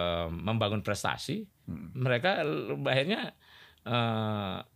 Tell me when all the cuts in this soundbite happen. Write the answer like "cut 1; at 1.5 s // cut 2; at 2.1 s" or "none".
none